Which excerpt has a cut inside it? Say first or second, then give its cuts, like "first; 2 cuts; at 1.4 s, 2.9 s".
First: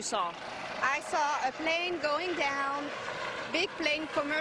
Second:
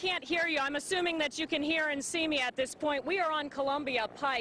second; 1 cut; at 2.1 s